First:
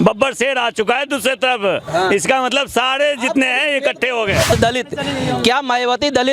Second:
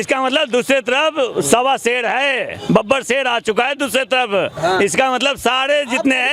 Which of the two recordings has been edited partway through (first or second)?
first